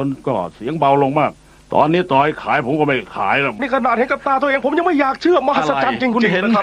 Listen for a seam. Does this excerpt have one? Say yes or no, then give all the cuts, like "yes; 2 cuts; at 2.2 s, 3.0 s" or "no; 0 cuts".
yes; 1 cut; at 3.6 s